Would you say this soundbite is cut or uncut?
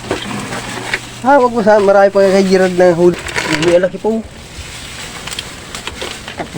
cut